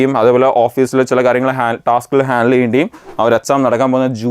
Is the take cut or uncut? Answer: cut